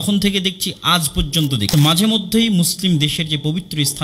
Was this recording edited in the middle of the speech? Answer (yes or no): yes